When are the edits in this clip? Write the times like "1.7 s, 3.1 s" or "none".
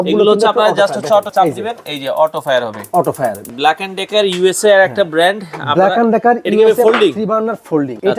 1.3 s, 3.4 s